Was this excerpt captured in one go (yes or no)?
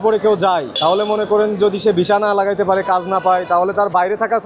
yes